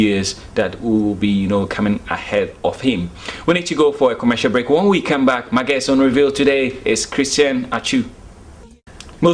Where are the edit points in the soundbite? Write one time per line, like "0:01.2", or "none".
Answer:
none